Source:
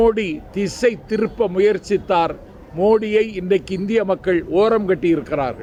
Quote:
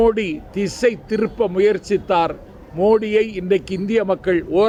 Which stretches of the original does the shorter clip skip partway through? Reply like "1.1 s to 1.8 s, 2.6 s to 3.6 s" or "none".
none